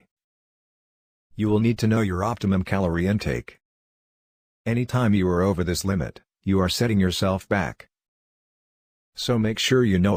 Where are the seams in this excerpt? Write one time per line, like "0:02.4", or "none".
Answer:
none